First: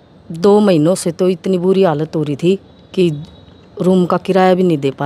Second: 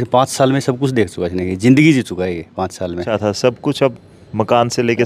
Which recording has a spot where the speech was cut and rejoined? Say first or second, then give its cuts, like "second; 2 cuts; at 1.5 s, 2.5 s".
second; 1 cut; at 3.1 s